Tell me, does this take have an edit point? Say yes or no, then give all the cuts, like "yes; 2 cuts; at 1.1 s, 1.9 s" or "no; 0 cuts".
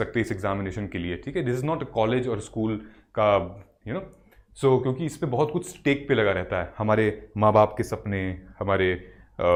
no; 0 cuts